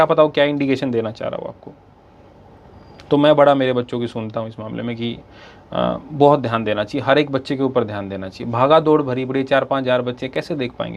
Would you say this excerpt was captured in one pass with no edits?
yes; 0 cuts

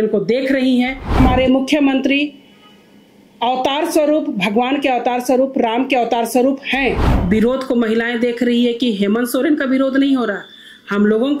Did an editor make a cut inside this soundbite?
yes; 2 cuts; at 1.2 s, 7.1 s

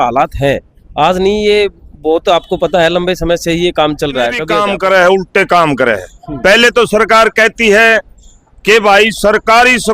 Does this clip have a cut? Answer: yes; 1 cut; at 4.5 s

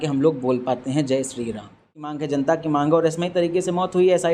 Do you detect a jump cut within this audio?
yes; 1 cut; at 2.2 s

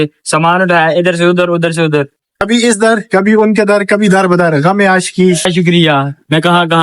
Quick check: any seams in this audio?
yes; 1 cut; at 2.4 s

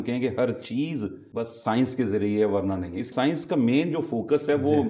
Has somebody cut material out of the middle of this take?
yes; 2 cuts; at 1.2 s, 3.1 s

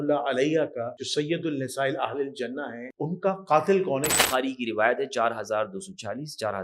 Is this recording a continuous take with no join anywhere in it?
no; 3 cuts; at 1.0 s, 2.8 s, 4.2 s

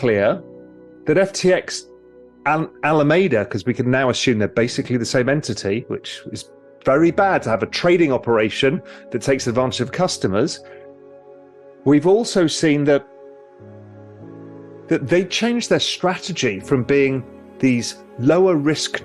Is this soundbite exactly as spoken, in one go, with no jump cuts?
yes; 0 cuts

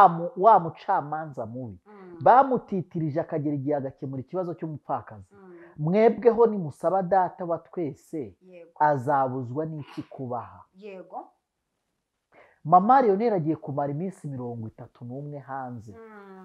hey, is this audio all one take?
yes; 0 cuts

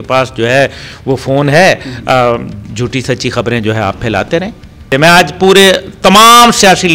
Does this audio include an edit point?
yes; 1 cut; at 4.9 s

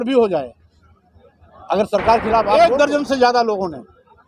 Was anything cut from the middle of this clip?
yes; 1 cut; at 2.6 s

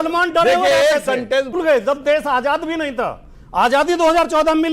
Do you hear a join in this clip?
yes; 1 cut; at 1.5 s

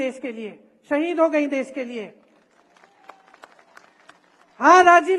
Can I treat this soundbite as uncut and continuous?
yes; 0 cuts

